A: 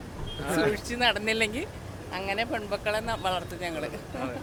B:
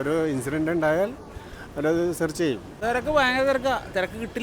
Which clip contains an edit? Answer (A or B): B